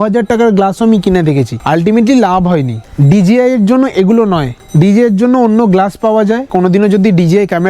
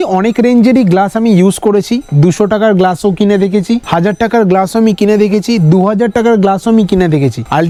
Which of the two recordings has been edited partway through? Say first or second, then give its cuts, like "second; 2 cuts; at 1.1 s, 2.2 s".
first; 2 cuts; at 2.8 s, 6.5 s